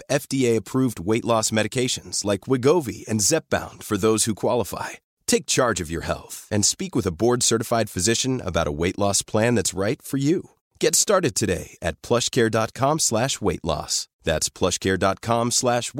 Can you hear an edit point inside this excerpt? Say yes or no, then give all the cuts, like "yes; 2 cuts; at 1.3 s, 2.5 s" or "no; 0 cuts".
no; 0 cuts